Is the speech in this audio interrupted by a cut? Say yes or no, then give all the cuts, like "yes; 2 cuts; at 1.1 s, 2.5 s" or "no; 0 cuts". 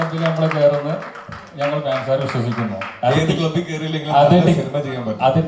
no; 0 cuts